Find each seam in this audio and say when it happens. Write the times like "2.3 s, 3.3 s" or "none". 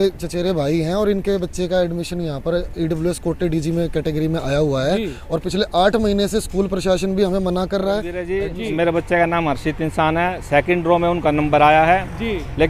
8.3 s